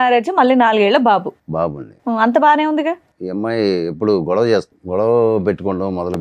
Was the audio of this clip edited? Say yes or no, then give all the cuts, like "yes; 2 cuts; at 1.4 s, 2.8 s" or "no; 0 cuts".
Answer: yes; 2 cuts; at 3.1 s, 4.8 s